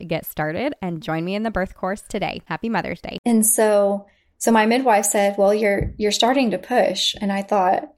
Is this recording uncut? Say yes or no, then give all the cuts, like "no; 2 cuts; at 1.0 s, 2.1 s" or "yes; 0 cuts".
no; 1 cut; at 3.0 s